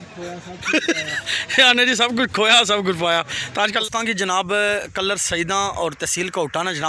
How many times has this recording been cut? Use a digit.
1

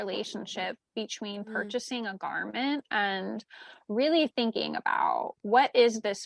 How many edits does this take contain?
0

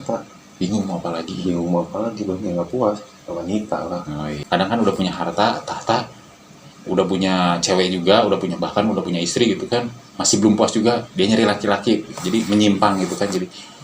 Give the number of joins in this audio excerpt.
1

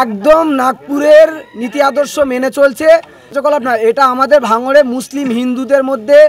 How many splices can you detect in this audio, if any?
1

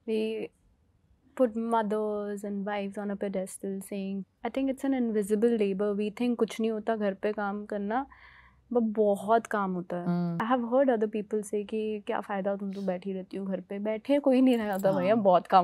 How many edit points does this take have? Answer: 2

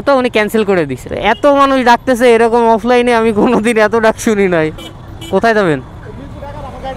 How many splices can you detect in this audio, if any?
2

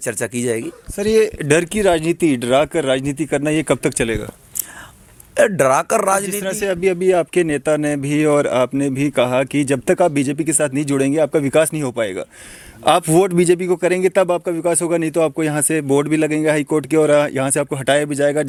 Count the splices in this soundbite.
0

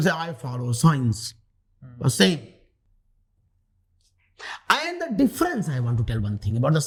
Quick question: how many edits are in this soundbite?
0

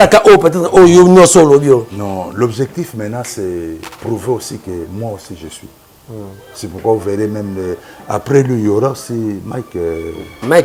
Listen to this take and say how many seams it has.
0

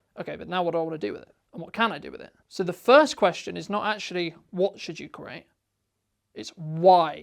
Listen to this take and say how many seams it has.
0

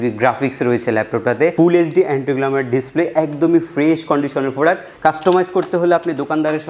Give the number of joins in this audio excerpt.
2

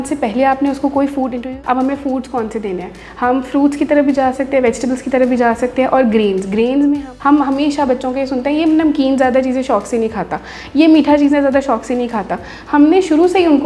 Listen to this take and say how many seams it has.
2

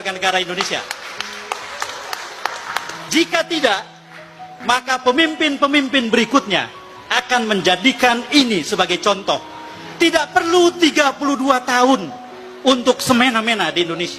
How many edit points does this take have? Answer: 0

